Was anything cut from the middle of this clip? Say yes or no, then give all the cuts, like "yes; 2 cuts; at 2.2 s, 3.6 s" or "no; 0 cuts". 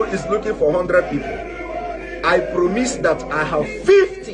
no; 0 cuts